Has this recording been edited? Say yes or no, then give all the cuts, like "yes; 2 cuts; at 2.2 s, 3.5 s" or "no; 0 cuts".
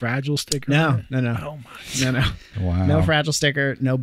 yes; 1 cut; at 2.4 s